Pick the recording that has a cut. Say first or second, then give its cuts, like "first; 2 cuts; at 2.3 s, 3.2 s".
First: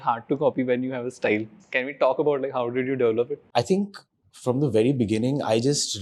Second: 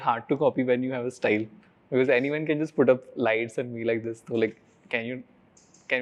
first; 2 cuts; at 1.6 s, 3.4 s